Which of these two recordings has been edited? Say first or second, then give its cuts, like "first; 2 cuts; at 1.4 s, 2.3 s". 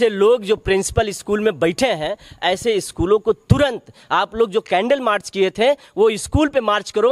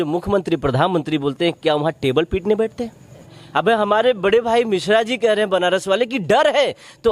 second; 1 cut; at 3.3 s